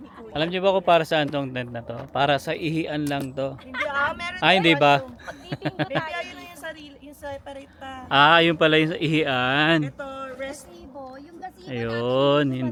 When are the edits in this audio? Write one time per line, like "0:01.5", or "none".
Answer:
none